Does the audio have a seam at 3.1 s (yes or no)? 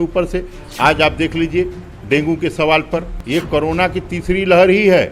yes